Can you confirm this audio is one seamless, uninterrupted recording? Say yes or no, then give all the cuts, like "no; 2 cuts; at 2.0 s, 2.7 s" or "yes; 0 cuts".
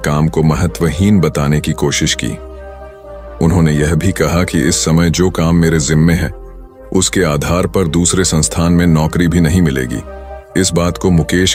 yes; 0 cuts